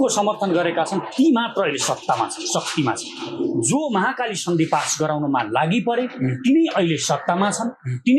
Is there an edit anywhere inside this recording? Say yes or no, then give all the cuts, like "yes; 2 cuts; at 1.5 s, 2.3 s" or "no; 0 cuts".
no; 0 cuts